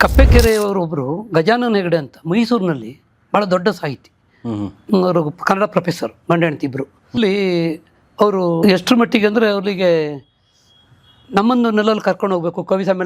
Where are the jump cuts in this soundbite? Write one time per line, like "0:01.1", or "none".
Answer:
0:07.2
0:08.6